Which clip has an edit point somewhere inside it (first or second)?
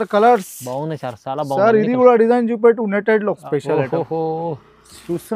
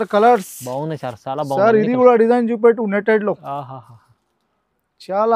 first